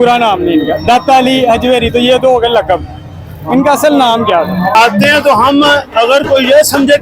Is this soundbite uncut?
no; 1 cut; at 4.7 s

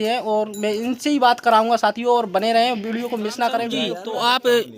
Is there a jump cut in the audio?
yes; 1 cut; at 3.9 s

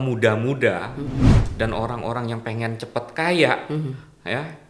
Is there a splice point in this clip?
yes; 1 cut; at 1.3 s

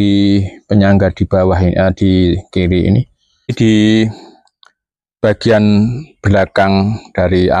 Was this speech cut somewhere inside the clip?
yes; 1 cut; at 3.5 s

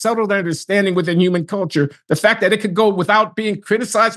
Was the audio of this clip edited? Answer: no; 0 cuts

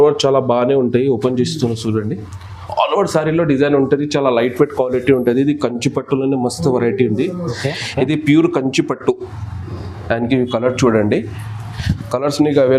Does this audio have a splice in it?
yes; 1 cut; at 7.6 s

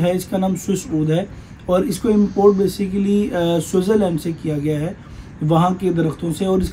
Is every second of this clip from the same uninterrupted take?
yes; 0 cuts

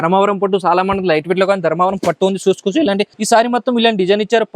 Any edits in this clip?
yes; 1 cut; at 3.1 s

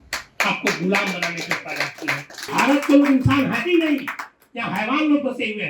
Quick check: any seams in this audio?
yes; 1 cut; at 2.5 s

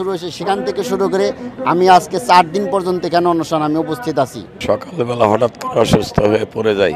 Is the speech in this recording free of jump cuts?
no; 1 cut; at 4.6 s

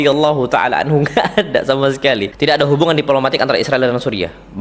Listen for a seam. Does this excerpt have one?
yes; 1 cut; at 2.3 s

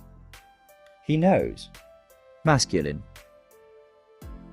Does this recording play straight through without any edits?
no; 1 cut; at 1.1 s

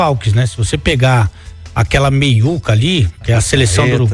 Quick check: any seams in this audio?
no; 0 cuts

